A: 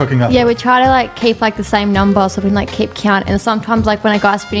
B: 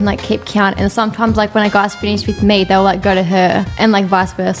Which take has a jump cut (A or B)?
A